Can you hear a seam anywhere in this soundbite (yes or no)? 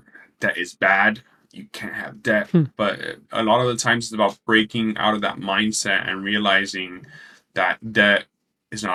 no